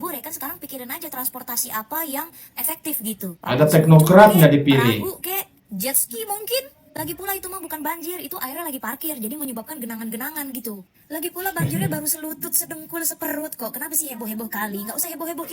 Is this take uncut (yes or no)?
yes